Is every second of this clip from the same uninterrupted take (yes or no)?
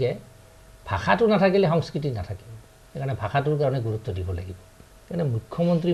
yes